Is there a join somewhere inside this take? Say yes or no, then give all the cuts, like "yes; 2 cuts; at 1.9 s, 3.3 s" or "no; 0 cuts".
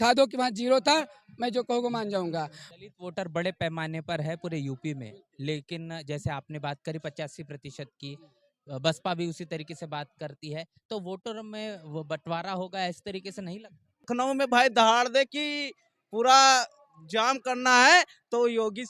yes; 2 cuts; at 2.6 s, 14.1 s